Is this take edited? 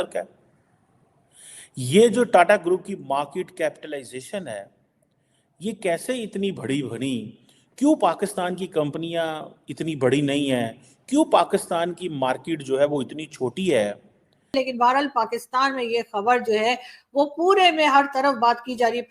yes; 1 cut; at 14.5 s

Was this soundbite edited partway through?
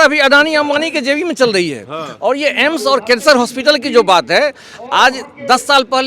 no; 0 cuts

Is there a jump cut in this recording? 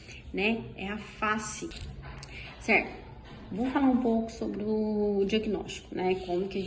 yes; 1 cut; at 1.9 s

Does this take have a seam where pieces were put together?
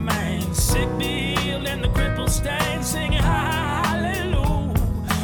no; 0 cuts

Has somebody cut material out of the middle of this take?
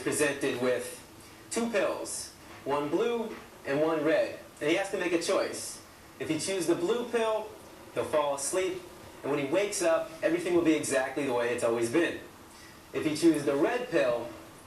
yes; 2 cuts; at 5.3 s, 11.9 s

